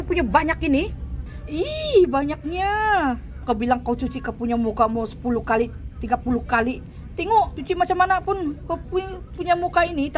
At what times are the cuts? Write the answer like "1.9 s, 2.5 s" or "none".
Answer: 1.2 s, 3.3 s, 7.6 s